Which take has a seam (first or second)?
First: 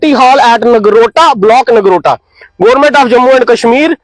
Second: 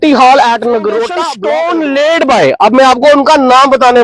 second